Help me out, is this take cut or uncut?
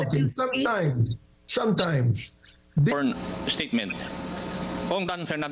cut